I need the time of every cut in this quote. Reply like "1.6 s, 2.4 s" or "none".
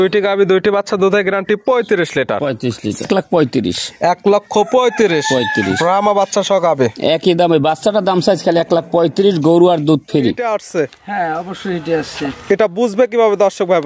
3.0 s, 10.4 s